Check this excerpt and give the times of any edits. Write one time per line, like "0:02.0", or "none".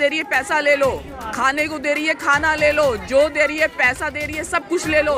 none